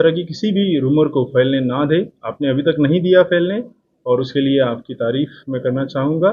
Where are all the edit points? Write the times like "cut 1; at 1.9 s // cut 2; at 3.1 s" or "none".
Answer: none